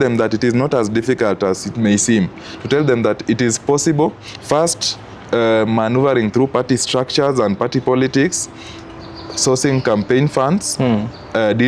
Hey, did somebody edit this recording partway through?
no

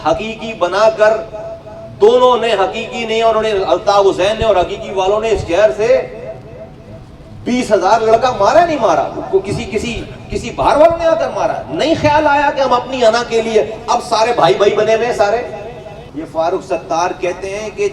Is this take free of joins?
no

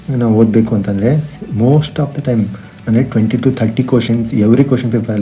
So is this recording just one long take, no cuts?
yes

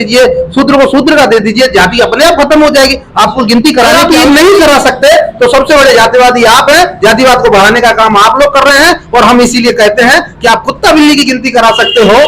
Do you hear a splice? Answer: yes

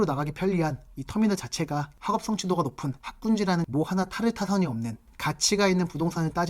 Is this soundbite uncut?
no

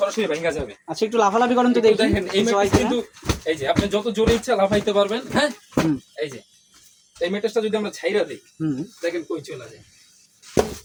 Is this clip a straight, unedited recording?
yes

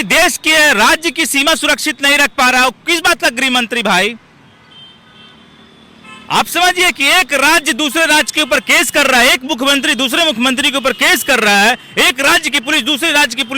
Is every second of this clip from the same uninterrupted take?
yes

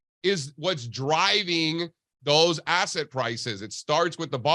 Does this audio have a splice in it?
no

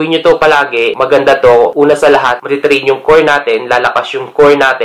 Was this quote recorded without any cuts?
no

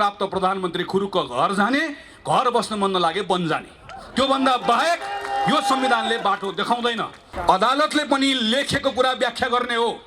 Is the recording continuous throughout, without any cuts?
no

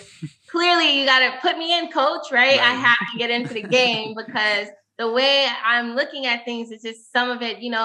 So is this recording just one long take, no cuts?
yes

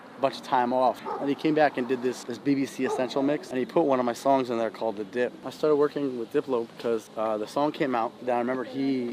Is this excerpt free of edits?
no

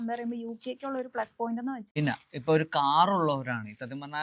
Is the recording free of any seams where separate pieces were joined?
no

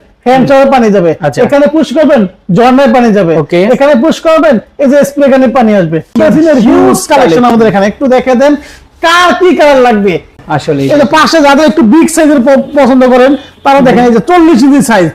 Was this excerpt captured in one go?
no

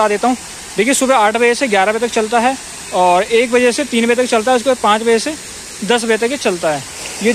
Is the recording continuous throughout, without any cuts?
yes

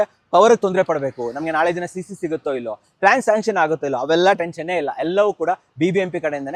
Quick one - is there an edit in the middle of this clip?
no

